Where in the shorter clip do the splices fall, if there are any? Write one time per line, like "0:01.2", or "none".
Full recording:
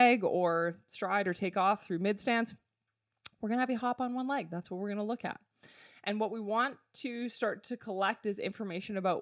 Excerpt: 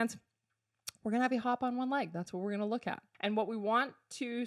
0:03.1